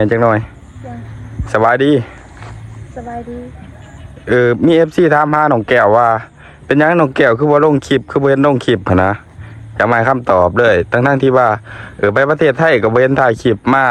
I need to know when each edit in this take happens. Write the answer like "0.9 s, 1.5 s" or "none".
none